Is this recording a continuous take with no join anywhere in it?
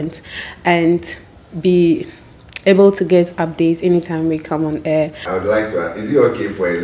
no; 1 cut; at 5.2 s

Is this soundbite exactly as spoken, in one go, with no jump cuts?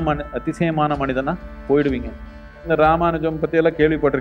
no; 1 cut; at 2.6 s

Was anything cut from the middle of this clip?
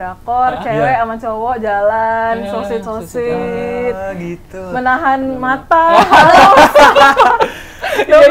no; 0 cuts

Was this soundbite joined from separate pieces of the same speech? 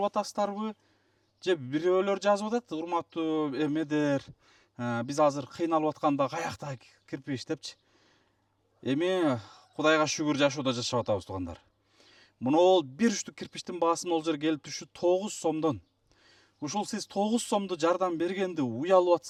no; 0 cuts

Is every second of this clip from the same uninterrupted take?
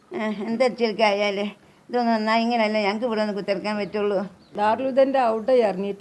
no; 1 cut; at 4.5 s

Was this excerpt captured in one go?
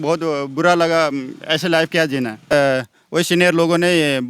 no; 1 cut; at 2.5 s

